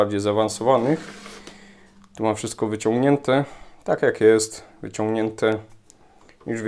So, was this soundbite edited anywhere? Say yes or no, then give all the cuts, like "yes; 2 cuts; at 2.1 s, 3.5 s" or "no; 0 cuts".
no; 0 cuts